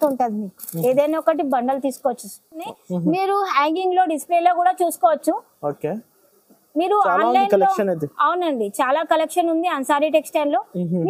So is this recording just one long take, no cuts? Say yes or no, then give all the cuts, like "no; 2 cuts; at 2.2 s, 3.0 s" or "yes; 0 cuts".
no; 1 cut; at 2.7 s